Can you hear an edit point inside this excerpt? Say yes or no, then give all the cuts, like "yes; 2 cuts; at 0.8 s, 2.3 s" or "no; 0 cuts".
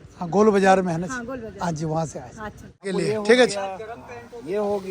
yes; 1 cut; at 2.9 s